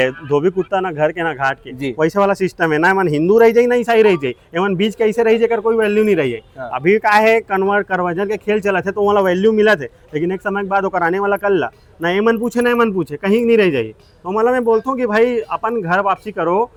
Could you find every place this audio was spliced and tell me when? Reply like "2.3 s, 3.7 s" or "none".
none

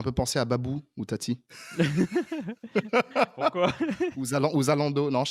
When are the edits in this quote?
none

